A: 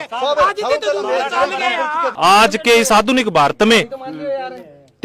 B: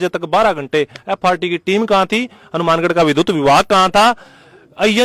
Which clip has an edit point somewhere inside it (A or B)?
A